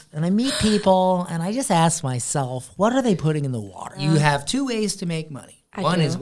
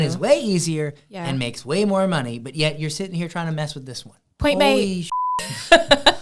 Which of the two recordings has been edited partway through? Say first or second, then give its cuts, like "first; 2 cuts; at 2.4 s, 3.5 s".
first; 1 cut; at 3.9 s